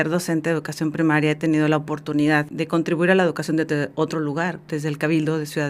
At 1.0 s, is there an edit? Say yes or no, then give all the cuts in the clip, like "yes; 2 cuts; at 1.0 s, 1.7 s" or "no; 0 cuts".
no; 2 cuts; at 2.5 s, 4.6 s